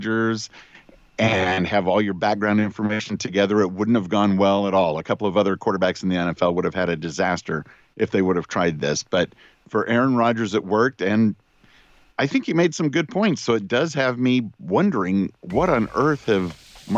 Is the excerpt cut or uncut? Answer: uncut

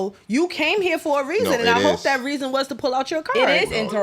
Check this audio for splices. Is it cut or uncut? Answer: uncut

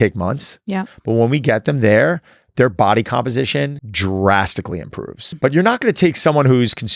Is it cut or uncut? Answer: cut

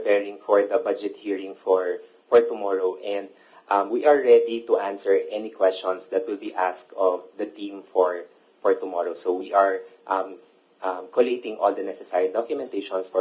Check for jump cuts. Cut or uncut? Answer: uncut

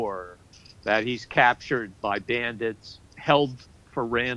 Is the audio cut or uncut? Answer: cut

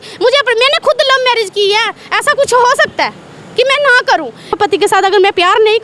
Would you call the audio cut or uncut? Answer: cut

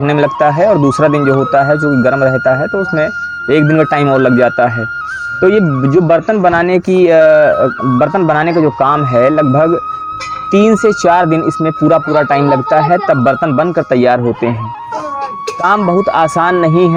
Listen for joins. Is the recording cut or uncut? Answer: uncut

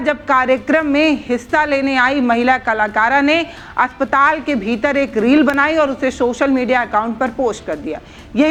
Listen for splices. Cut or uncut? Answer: uncut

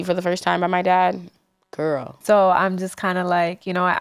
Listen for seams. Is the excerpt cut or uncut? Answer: cut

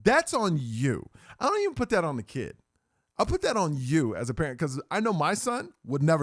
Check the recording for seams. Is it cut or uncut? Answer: uncut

